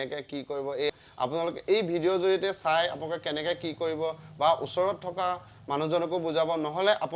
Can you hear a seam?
yes; 1 cut; at 0.9 s

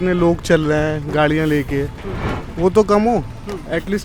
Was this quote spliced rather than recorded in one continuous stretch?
no; 0 cuts

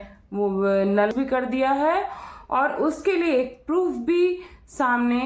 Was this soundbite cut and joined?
yes; 1 cut; at 1.1 s

